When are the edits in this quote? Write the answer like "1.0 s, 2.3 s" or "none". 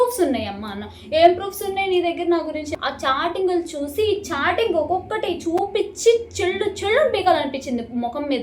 2.7 s